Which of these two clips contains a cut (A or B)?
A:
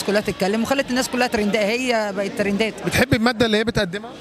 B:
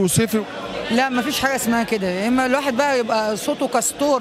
A